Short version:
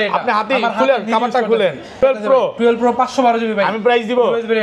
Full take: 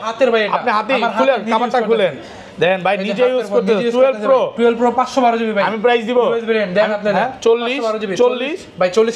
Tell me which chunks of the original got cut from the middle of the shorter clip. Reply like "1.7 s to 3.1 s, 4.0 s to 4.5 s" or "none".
2.4 s to 4.0 s

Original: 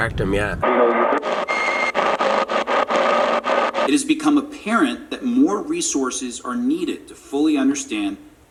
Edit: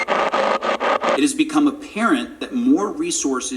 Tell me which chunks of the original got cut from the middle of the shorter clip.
3.0 s to 3.9 s

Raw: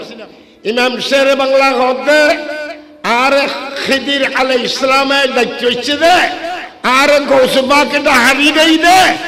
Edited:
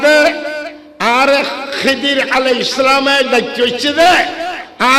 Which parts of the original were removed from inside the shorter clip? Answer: none

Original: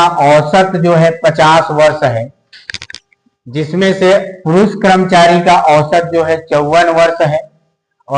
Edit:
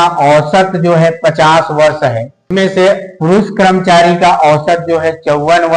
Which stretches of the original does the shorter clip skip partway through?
2.4 s to 3.7 s

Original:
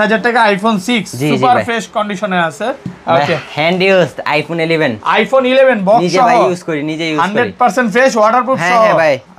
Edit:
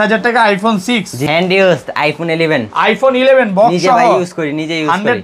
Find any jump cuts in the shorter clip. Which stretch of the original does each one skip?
1.2 s to 3.5 s

